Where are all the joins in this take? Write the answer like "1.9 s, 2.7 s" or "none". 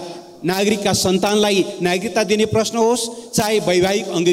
none